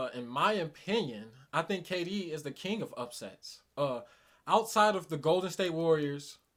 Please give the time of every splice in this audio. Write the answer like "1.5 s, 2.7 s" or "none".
none